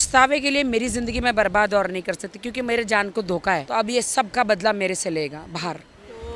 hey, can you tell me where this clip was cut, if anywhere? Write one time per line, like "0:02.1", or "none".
0:03.6